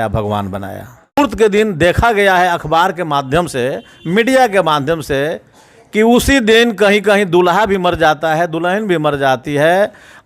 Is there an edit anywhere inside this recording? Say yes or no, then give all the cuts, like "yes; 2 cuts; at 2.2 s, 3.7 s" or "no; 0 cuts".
yes; 1 cut; at 1.2 s